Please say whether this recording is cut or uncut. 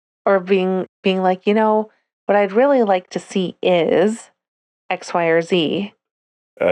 uncut